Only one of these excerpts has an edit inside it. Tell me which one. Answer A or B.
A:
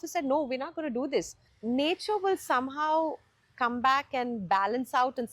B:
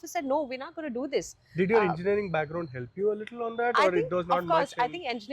A